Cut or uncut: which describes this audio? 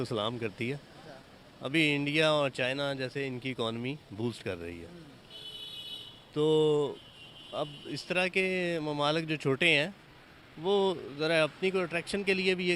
uncut